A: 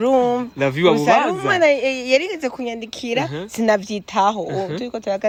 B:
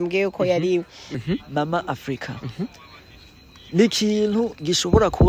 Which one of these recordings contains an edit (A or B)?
B